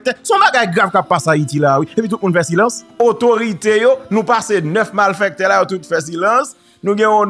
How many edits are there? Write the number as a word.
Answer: one